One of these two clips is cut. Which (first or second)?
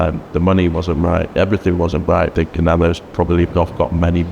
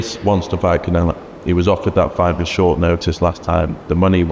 first